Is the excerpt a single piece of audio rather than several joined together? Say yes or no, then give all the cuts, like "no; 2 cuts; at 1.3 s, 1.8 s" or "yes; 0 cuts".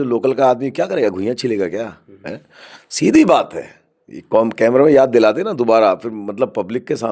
yes; 0 cuts